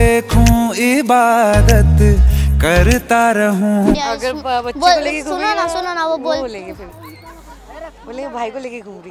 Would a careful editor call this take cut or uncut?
cut